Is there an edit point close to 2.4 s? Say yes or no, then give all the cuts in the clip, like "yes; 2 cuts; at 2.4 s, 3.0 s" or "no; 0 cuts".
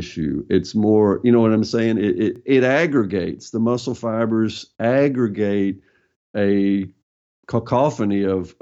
yes; 1 cut; at 2.4 s